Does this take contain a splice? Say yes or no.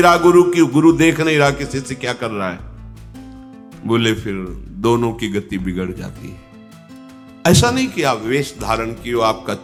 no